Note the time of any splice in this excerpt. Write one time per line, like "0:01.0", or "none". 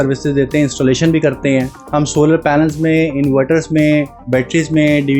0:01.8
0:04.2